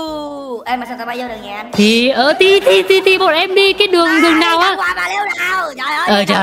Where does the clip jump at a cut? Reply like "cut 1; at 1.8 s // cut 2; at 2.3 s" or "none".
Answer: none